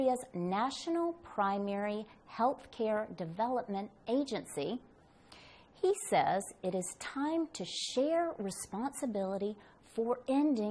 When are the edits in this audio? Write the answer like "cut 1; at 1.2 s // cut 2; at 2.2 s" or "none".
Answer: cut 1; at 1.2 s